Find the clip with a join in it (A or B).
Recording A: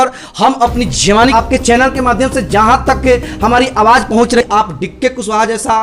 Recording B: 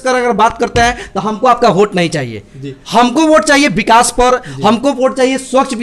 A